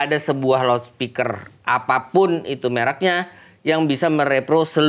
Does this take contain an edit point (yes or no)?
no